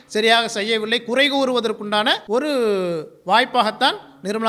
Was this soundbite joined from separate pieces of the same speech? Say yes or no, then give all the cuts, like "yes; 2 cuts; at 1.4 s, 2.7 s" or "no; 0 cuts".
yes; 1 cut; at 2.2 s